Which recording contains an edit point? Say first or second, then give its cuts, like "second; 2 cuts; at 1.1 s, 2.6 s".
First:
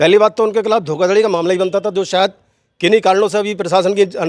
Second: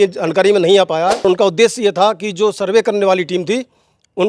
second; 1 cut; at 1.2 s